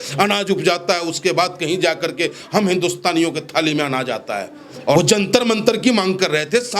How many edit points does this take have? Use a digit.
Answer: 1